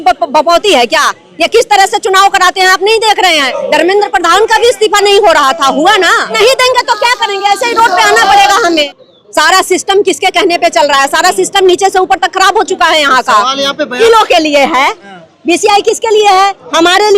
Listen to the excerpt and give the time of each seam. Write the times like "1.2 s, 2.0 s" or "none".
3.5 s, 6.3 s, 8.9 s, 14.0 s